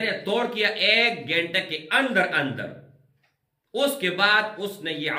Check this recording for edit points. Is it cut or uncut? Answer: uncut